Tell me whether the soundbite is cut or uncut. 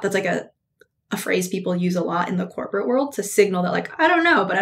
uncut